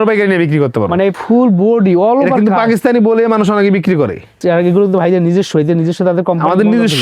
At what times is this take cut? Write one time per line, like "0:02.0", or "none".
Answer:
0:01.2
0:04.4